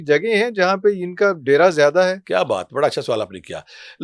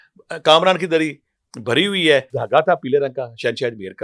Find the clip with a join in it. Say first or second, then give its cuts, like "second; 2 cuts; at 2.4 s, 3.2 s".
second; 1 cut; at 2.3 s